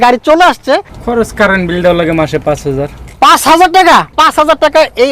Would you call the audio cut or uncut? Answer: cut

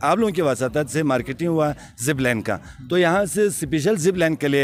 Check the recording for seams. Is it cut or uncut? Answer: uncut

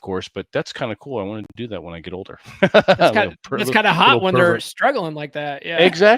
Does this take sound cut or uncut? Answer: uncut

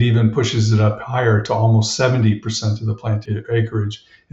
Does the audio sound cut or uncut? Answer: cut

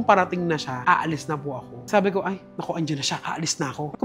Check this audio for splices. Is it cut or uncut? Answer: uncut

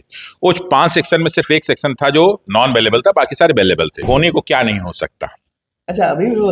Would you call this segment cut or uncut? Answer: cut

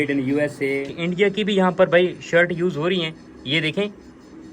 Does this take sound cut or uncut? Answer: cut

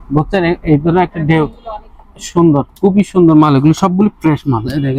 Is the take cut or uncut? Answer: uncut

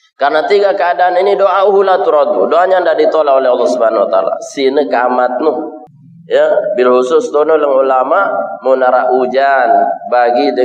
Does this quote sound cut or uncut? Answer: cut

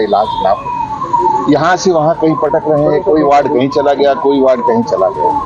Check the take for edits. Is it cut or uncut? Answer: uncut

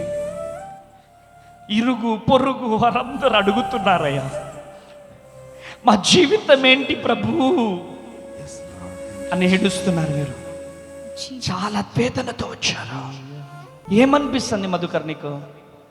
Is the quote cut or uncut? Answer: cut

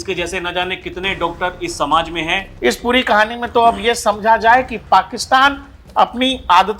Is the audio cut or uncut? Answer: cut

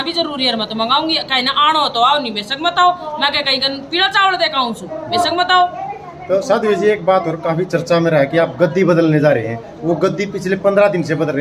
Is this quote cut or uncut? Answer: uncut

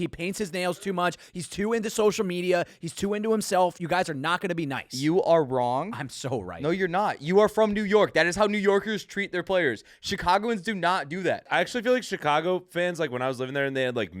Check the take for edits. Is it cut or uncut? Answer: cut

